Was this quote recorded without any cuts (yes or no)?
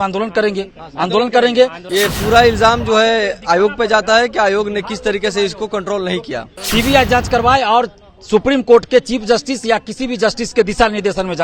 no